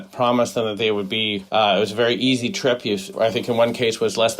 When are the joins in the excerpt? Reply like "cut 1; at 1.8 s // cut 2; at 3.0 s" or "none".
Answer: cut 1; at 2.9 s